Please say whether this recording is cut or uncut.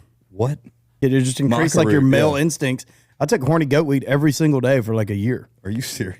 cut